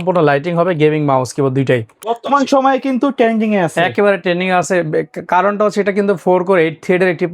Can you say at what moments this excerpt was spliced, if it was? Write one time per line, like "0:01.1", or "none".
0:02.1